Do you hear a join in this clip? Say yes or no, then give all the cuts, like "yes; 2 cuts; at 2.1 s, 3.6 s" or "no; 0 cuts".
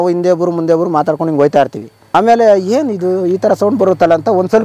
yes; 1 cut; at 2.0 s